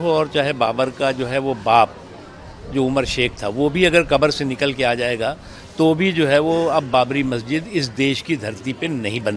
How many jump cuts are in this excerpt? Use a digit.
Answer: 0